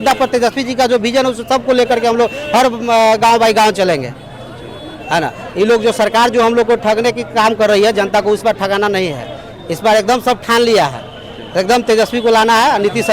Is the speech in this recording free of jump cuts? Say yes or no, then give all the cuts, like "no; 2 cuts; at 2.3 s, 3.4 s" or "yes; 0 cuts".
yes; 0 cuts